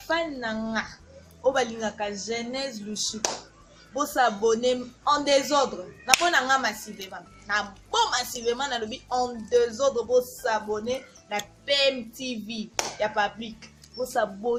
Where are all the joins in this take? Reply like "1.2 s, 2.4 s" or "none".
none